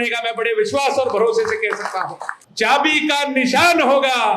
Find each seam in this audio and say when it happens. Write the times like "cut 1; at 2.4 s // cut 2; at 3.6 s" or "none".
cut 1; at 2.4 s